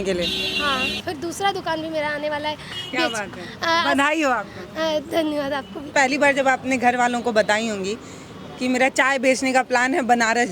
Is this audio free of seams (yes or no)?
no